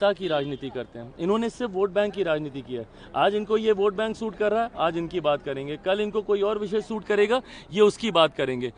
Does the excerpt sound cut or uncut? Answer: uncut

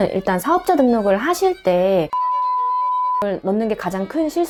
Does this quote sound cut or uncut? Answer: uncut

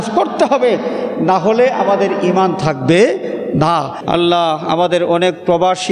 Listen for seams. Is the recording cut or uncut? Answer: cut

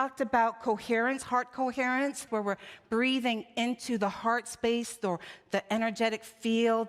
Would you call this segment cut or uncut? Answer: cut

